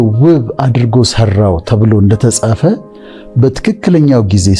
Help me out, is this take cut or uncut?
uncut